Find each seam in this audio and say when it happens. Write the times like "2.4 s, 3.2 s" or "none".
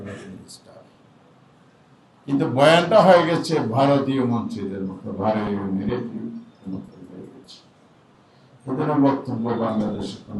none